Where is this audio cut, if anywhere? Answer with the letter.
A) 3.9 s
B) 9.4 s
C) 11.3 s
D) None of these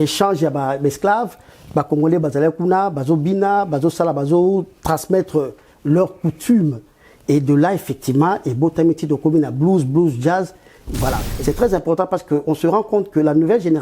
C